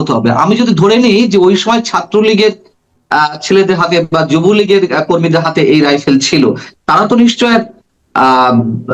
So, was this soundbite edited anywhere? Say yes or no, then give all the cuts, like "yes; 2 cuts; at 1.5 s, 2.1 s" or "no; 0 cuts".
no; 0 cuts